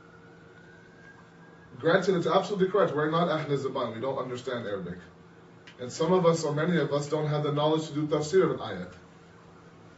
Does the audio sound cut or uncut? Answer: uncut